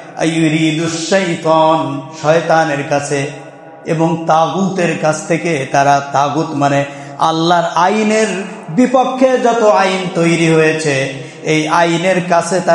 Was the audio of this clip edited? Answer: no; 0 cuts

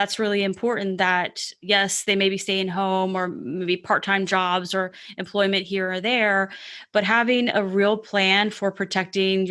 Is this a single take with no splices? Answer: yes; 0 cuts

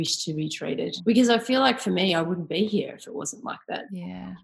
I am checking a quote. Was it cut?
yes; 1 cut; at 1.0 s

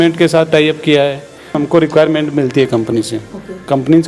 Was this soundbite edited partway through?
yes; 1 cut; at 1.6 s

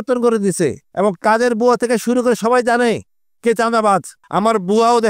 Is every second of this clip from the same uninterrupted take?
no; 2 cuts; at 0.8 s, 4.2 s

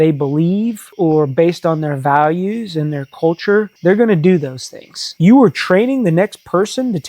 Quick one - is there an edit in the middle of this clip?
yes; 1 cut; at 5.1 s

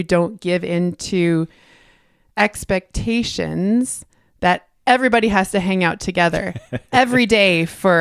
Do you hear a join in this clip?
no; 0 cuts

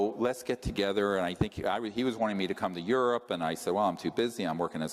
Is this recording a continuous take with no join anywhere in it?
no; 1 cut; at 1.0 s

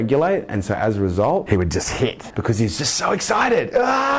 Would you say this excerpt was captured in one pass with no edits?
no; 1 cut; at 2.0 s

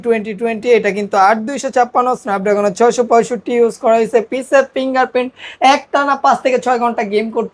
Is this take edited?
no; 0 cuts

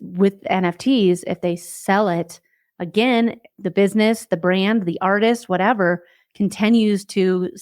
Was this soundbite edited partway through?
yes; 1 cut; at 3.5 s

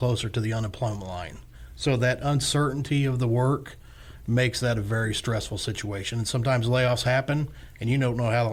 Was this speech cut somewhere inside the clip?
no; 0 cuts

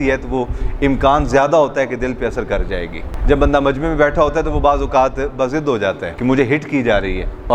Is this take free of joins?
yes; 0 cuts

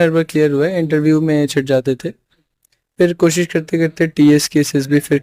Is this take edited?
no; 0 cuts

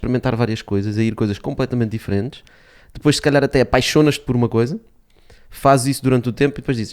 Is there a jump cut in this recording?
no; 0 cuts

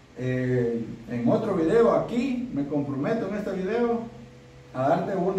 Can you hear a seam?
no; 0 cuts

